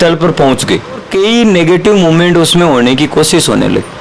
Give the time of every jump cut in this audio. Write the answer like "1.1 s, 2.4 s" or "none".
1.1 s

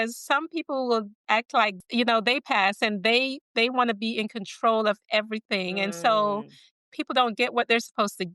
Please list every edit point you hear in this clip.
1.1 s

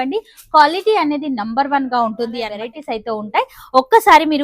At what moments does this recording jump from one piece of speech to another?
2.7 s

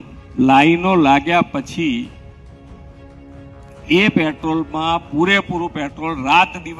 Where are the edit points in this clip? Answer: 2.4 s, 3.9 s

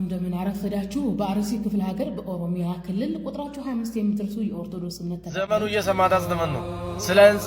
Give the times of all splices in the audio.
5.6 s

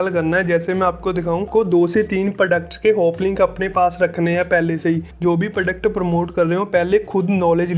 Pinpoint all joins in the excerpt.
1.5 s, 5.1 s

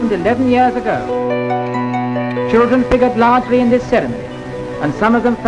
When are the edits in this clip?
2.3 s

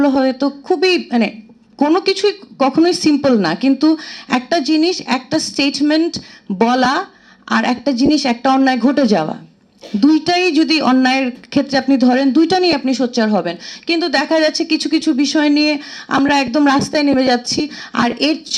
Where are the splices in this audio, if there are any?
none

